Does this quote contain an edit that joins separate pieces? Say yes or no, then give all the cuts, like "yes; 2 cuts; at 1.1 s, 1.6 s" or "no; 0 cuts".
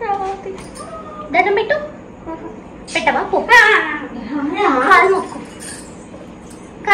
no; 0 cuts